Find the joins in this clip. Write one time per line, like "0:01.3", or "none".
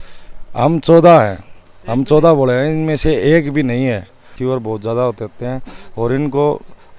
0:04.3